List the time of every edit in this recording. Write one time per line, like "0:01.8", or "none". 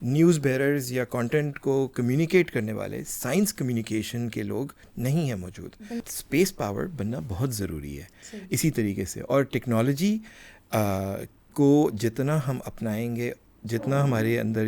0:06.1